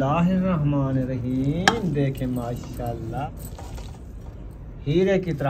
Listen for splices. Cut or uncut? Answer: cut